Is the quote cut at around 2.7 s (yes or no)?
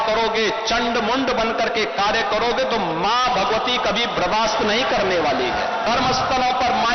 no